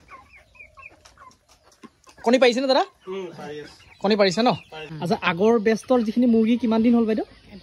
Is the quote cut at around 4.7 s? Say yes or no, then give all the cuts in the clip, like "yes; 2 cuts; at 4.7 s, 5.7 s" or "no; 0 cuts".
yes; 1 cut; at 4.7 s